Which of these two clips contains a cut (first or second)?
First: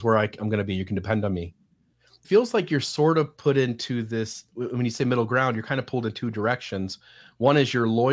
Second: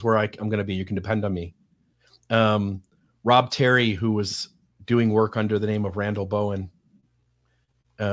first